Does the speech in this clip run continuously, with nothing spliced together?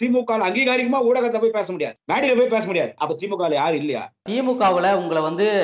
no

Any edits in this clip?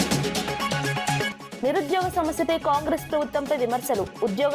yes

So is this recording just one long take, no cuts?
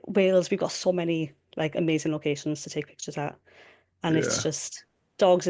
yes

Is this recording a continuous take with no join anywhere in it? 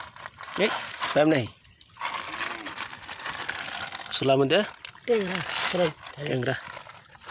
yes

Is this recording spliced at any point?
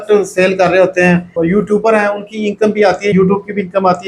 yes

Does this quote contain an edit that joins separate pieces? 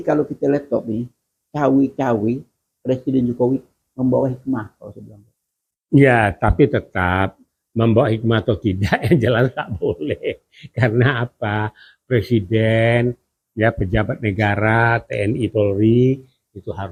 no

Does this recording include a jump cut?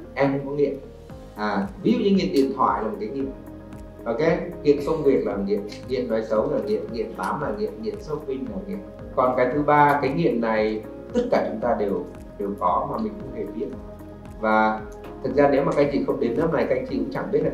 yes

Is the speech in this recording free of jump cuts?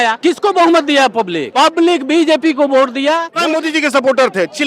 no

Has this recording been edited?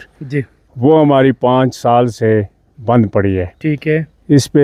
no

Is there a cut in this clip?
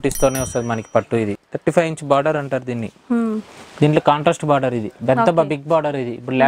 yes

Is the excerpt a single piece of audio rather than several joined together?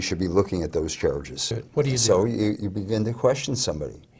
no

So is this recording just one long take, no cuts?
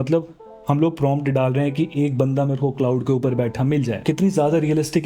yes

